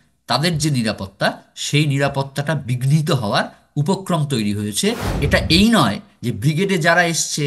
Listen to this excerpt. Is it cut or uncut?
cut